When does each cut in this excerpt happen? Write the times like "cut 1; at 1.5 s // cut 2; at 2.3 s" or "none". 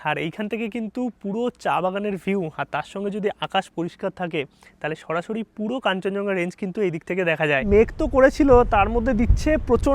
cut 1; at 7.6 s